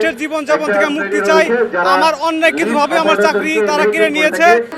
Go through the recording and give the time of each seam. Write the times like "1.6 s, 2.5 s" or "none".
none